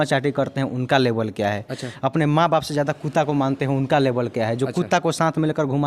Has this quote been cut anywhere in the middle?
no; 0 cuts

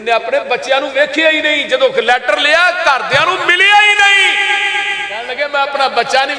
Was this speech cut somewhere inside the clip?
yes; 1 cut; at 5.3 s

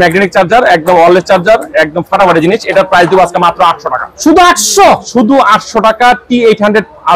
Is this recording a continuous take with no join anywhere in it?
yes; 0 cuts

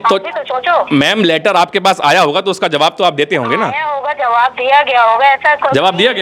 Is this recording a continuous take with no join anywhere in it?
yes; 0 cuts

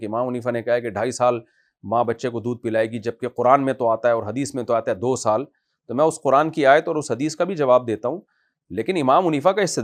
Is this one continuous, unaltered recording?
yes; 0 cuts

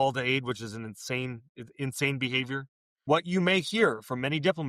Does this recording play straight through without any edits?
no; 1 cut; at 2.9 s

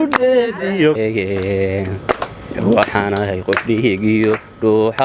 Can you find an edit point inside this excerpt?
yes; 1 cut; at 1.0 s

